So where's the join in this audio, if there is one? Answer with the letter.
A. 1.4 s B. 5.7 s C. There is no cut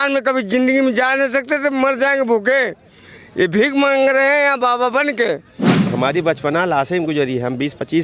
B